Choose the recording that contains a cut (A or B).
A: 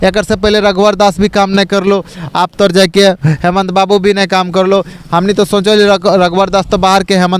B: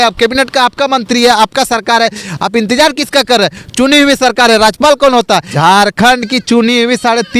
B